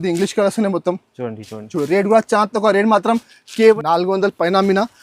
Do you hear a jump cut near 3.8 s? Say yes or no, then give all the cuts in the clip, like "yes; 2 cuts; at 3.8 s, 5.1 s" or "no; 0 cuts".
yes; 1 cut; at 3.8 s